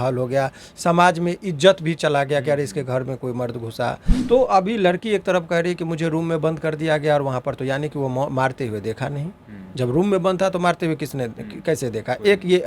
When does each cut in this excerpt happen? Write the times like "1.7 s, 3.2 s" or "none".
4.1 s